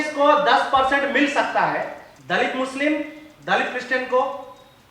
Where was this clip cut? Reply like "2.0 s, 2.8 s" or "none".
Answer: 2.1 s